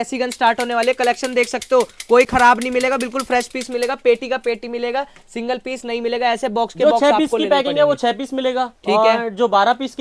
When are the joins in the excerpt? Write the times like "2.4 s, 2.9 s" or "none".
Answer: none